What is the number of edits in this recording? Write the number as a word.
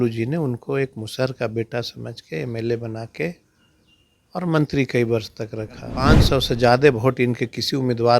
one